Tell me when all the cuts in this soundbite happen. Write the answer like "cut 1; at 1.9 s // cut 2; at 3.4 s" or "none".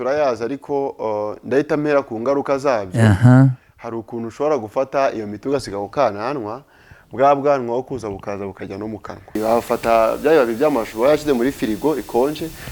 cut 1; at 9.4 s